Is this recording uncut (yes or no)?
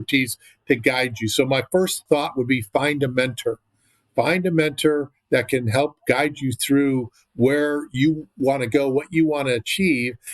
no